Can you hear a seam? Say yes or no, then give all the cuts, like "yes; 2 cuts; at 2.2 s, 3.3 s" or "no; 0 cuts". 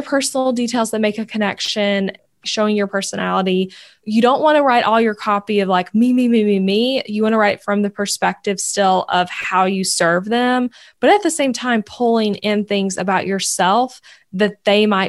yes; 2 cuts; at 2.2 s, 4.0 s